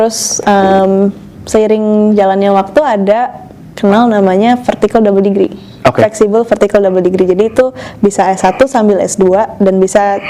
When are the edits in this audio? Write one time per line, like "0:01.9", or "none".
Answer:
none